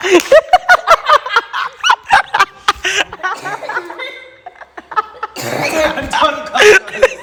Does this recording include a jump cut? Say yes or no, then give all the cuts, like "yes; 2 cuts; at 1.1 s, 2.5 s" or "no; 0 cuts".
no; 0 cuts